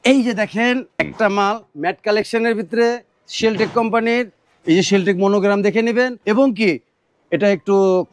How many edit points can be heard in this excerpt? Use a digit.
2